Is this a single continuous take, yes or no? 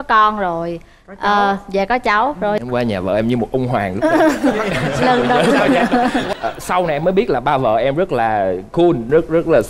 no